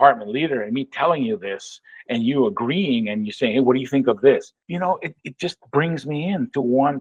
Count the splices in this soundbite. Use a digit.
1